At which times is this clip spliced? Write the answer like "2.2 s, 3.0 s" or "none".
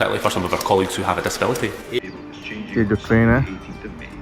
2.0 s